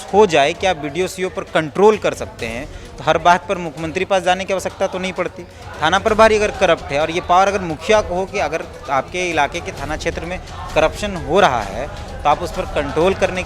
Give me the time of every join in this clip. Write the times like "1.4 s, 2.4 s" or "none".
none